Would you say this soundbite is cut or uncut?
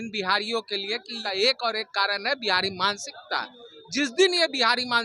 cut